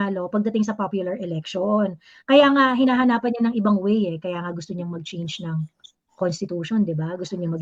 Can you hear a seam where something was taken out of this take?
no; 0 cuts

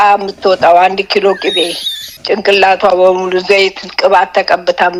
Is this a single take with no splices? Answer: yes; 0 cuts

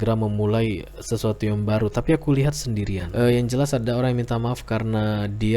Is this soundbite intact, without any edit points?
no; 1 cut; at 3.0 s

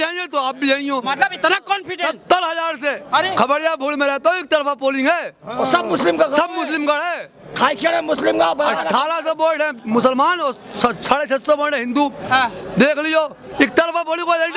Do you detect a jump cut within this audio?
no; 0 cuts

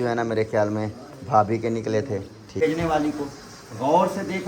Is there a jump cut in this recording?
yes; 1 cut; at 2.6 s

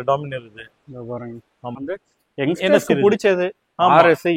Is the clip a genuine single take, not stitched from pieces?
no; 1 cut; at 1.8 s

